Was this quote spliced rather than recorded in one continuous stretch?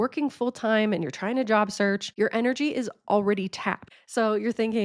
yes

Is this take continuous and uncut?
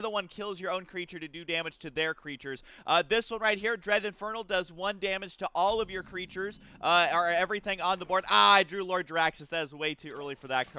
no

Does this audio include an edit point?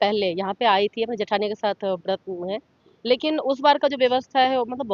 no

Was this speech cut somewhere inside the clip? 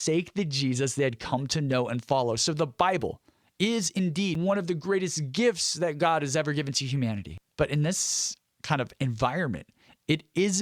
yes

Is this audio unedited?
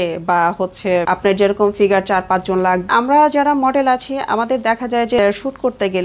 no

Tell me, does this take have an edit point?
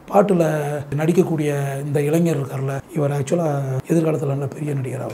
yes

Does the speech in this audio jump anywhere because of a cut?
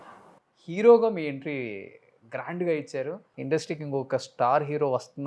yes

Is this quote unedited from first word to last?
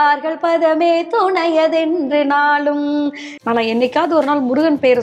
no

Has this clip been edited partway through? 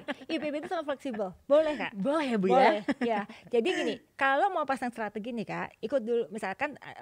no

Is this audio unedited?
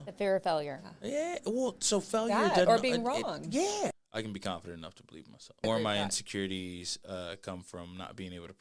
no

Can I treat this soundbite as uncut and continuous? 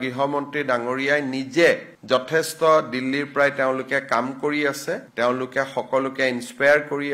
yes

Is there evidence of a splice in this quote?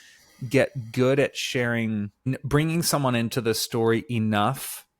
yes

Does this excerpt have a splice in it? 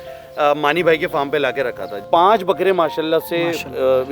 yes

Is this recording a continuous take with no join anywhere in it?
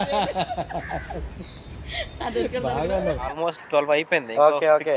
no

